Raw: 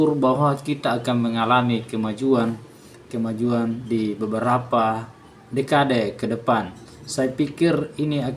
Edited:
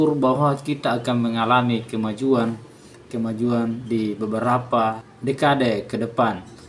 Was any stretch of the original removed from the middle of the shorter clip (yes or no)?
yes